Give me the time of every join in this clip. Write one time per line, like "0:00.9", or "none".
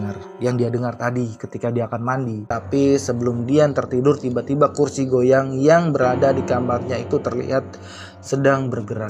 0:02.4